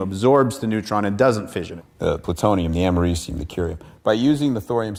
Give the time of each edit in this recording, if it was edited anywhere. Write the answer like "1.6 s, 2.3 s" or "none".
none